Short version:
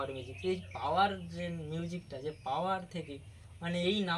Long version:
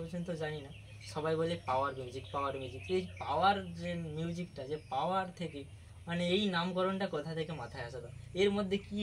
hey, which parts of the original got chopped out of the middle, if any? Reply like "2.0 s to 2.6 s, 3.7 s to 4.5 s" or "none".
none